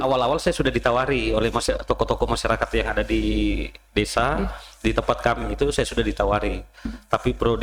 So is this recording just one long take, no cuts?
yes; 0 cuts

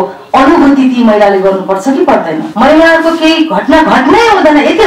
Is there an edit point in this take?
yes; 1 cut; at 2.5 s

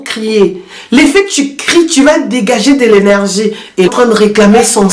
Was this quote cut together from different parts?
yes; 1 cut; at 3.9 s

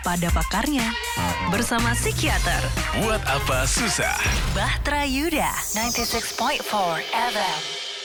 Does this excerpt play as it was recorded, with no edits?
yes; 0 cuts

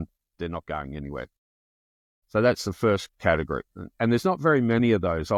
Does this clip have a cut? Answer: no; 0 cuts

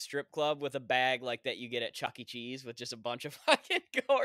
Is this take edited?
no; 0 cuts

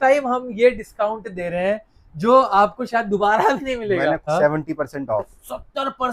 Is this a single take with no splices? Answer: no; 1 cut; at 4.2 s

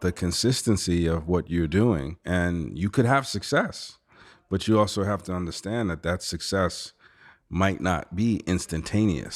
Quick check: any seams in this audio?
yes; 1 cut; at 2.1 s

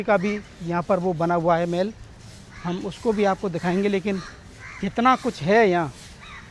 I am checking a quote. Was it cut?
no; 0 cuts

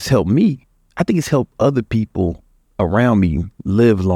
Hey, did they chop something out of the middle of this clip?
no; 0 cuts

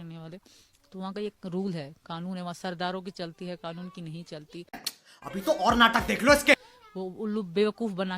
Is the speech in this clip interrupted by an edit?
yes; 2 cuts; at 4.9 s, 6.7 s

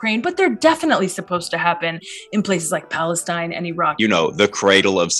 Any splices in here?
yes; 1 cut; at 3.9 s

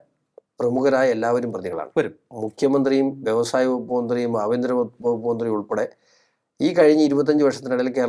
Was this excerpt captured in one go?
yes; 0 cuts

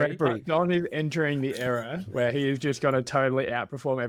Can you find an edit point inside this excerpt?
no; 0 cuts

